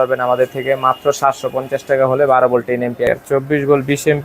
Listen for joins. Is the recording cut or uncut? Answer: cut